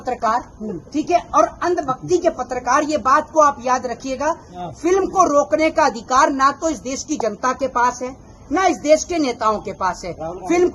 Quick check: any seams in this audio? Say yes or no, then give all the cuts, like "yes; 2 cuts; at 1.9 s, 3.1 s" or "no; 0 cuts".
no; 0 cuts